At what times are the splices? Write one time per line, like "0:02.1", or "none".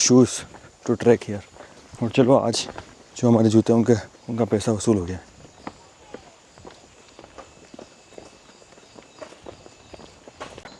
none